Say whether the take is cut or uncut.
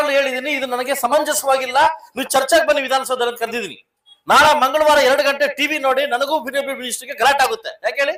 uncut